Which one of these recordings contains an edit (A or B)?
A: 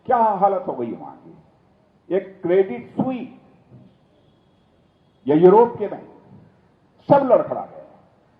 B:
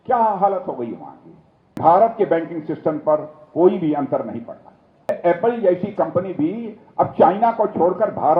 B